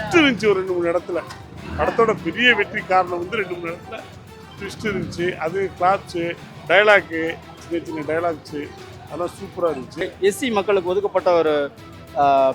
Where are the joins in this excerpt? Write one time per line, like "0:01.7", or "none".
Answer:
0:10.0